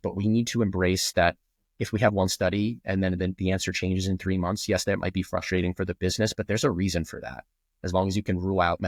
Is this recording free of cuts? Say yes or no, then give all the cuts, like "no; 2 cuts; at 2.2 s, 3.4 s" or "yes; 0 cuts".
yes; 0 cuts